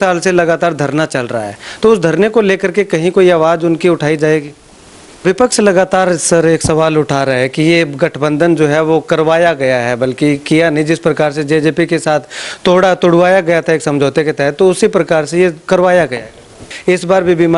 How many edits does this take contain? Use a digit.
2